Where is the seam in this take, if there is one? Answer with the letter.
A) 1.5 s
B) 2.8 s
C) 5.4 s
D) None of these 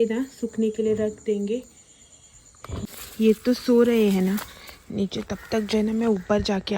B